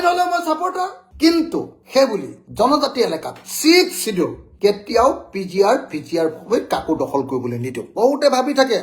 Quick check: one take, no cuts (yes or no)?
no